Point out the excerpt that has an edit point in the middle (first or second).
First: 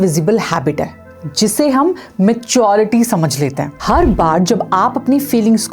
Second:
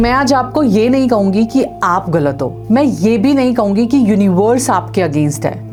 first